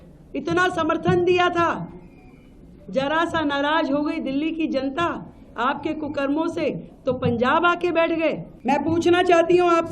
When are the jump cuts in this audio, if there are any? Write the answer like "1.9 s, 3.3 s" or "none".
8.5 s